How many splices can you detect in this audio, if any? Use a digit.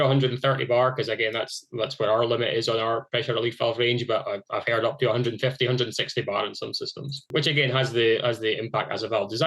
1